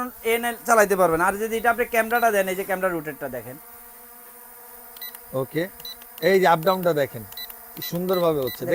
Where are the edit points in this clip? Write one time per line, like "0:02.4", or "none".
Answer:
none